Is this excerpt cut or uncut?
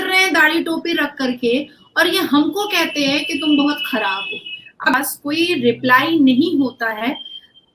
cut